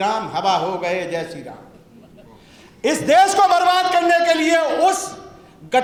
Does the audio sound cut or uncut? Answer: uncut